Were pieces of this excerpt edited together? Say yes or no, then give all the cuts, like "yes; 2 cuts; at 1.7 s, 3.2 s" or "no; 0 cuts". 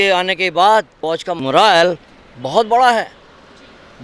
yes; 1 cut; at 1.4 s